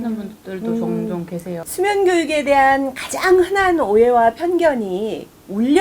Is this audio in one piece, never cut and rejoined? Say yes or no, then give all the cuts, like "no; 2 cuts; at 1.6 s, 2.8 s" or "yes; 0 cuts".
no; 1 cut; at 1.6 s